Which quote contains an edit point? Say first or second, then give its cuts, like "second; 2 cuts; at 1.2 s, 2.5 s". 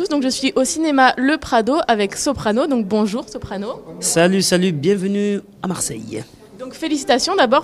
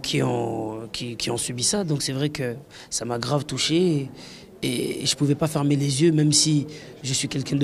second; 1 cut; at 6.5 s